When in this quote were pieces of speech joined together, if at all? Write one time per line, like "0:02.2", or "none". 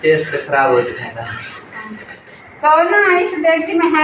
0:02.2